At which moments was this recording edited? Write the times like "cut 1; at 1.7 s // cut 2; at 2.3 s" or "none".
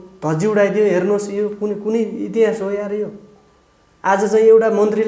none